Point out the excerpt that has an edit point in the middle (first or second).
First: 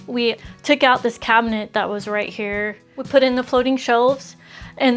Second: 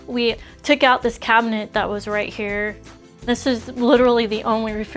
second